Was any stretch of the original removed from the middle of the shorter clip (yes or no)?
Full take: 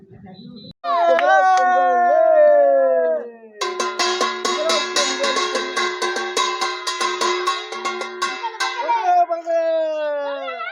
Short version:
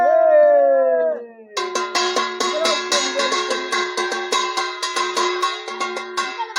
no